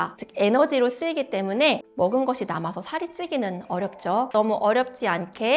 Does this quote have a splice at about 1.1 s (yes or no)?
no